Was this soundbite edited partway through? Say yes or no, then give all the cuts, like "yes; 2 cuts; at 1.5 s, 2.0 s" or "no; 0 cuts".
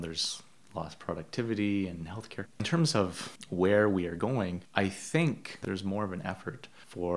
yes; 2 cuts; at 2.6 s, 5.6 s